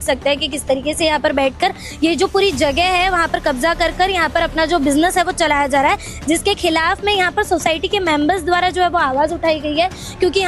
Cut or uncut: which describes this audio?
uncut